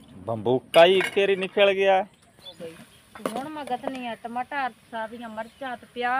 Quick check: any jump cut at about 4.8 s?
no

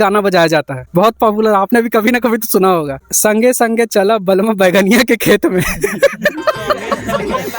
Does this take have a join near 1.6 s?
no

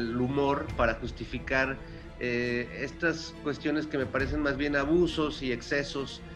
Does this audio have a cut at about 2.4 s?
no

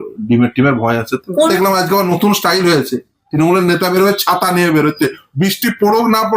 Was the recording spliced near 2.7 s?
no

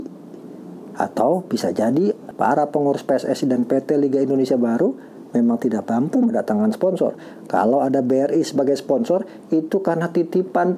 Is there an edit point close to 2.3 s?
yes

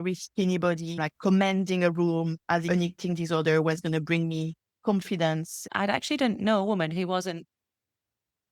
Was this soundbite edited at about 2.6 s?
yes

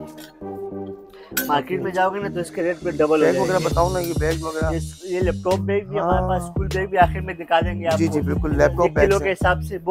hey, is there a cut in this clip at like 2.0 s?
no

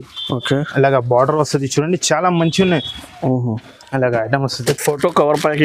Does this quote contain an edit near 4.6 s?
yes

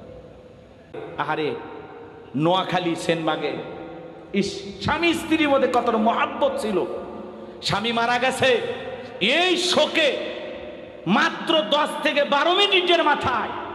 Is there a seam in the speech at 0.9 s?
yes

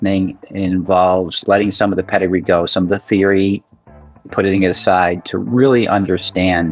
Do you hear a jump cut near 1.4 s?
yes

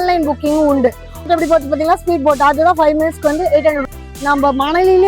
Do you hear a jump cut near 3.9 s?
yes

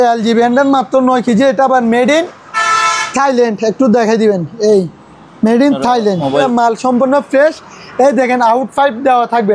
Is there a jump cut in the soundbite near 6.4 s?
yes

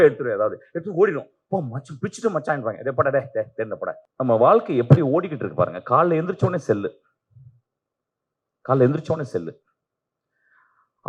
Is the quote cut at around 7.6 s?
no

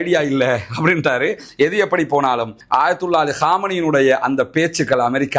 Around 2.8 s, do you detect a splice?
no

